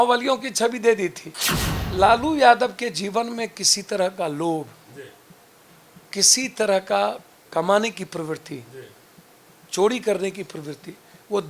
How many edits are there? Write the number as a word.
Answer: one